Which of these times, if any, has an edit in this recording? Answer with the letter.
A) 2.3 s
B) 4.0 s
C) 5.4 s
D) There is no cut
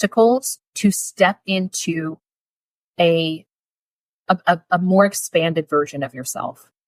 D